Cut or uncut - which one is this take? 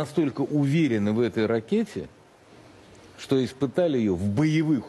uncut